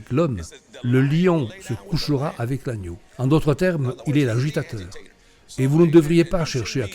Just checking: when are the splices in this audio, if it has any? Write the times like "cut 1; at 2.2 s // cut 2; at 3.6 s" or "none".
cut 1; at 3.0 s

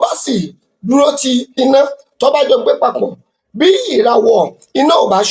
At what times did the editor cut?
cut 1; at 1.5 s

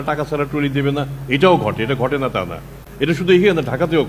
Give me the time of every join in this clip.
none

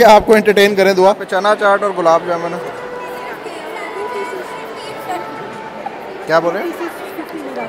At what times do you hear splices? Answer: none

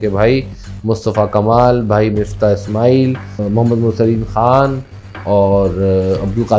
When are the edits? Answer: none

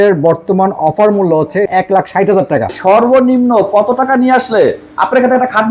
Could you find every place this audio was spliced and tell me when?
cut 1; at 2.7 s

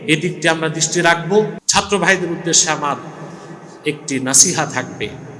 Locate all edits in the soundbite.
cut 1; at 1.6 s

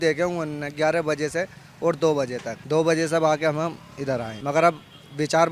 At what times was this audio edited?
cut 1; at 2.5 s // cut 2; at 4.3 s

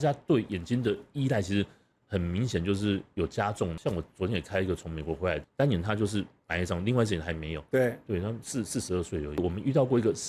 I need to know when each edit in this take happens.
cut 1; at 3.7 s // cut 2; at 5.5 s // cut 3; at 9.4 s

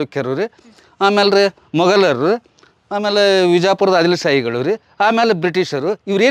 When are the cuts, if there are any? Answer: none

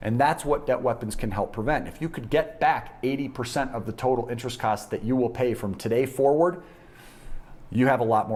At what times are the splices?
none

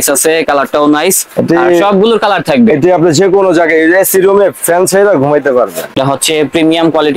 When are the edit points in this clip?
cut 1; at 6.0 s

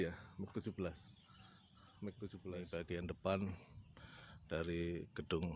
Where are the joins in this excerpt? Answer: cut 1; at 2.6 s

